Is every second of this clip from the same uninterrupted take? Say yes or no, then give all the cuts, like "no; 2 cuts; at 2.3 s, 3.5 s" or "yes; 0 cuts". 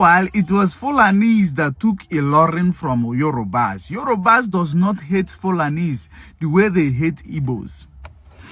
yes; 0 cuts